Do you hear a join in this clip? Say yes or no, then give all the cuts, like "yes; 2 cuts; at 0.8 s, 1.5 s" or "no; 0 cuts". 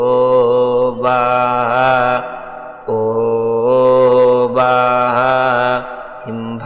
no; 0 cuts